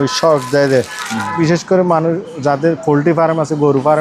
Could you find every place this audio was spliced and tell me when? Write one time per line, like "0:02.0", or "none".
0:01.4

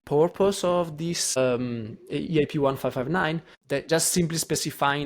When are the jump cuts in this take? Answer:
0:01.4
0:03.5

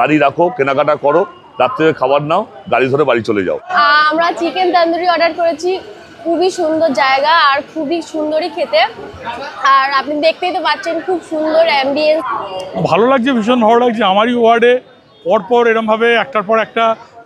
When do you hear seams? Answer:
0:03.7
0:12.3

